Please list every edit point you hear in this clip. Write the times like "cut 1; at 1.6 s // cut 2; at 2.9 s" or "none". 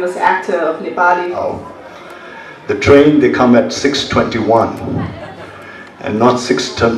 cut 1; at 1.4 s